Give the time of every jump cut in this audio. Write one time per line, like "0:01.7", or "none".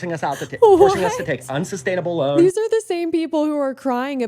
0:02.3